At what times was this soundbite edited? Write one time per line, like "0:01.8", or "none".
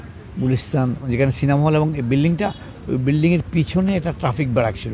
0:01.1